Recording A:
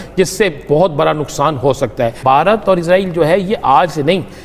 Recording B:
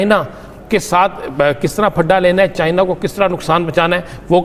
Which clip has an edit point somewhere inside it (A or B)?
A